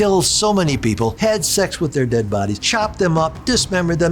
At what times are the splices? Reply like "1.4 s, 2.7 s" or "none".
1.1 s, 2.6 s